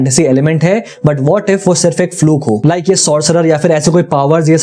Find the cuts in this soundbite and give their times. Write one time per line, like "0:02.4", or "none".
none